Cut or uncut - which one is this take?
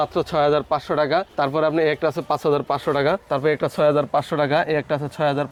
uncut